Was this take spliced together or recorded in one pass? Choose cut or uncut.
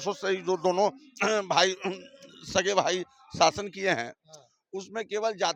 uncut